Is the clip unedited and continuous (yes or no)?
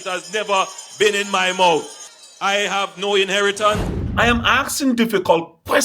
no